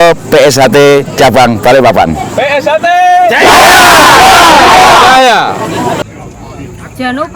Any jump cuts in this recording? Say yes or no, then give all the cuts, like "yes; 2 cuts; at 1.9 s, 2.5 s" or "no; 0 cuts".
yes; 1 cut; at 6.0 s